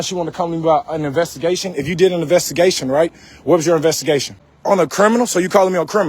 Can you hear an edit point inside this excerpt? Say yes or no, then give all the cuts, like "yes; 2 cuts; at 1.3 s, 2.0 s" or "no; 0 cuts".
yes; 1 cut; at 4.5 s